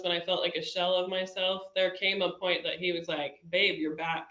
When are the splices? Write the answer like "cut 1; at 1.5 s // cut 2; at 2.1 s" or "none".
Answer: none